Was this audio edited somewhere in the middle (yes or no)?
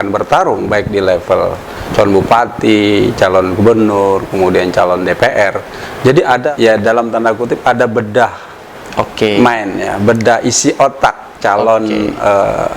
yes